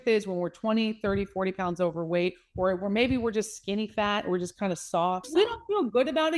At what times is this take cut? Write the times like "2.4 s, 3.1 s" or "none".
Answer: 5.3 s